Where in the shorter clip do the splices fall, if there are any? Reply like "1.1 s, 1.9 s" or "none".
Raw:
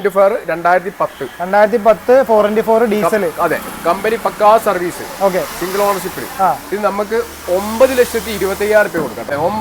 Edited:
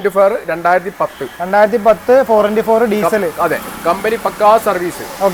none